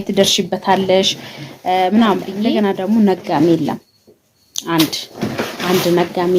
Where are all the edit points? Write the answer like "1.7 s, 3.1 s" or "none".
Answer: 2.4 s